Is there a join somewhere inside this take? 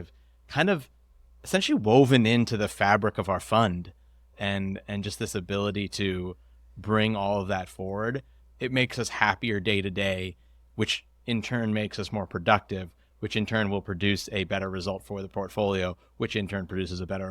yes; 2 cuts; at 4.2 s, 13.0 s

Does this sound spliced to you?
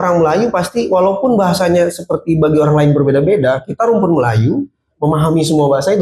no; 0 cuts

